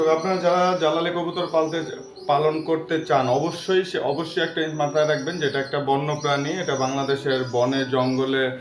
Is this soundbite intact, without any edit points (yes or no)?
yes